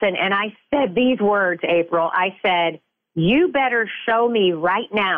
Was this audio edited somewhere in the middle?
no; 0 cuts

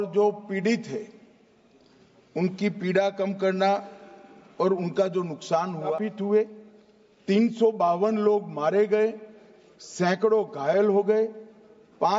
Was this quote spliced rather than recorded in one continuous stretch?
yes; 1 cut; at 5.9 s

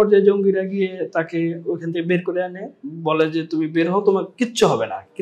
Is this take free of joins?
yes; 0 cuts

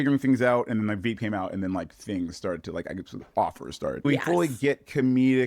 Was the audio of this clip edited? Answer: yes; 1 cut; at 4.0 s

